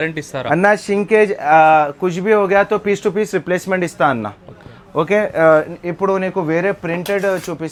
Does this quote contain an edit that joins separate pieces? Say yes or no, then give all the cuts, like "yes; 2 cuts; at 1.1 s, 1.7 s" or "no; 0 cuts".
no; 0 cuts